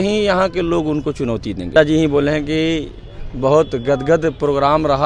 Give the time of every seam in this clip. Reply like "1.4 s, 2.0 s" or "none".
1.7 s